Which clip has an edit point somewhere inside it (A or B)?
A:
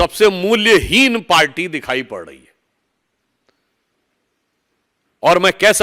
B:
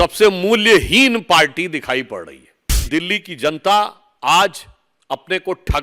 B